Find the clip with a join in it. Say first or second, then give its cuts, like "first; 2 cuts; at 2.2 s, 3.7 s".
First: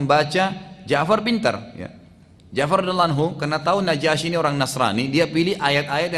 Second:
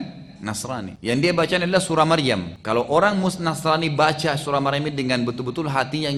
second; 2 cuts; at 0.9 s, 2.5 s